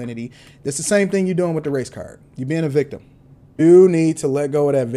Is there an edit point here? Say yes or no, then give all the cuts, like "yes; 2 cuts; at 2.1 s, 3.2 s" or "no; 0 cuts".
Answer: yes; 1 cut; at 3.6 s